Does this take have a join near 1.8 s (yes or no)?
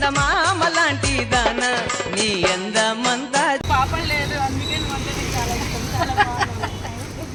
no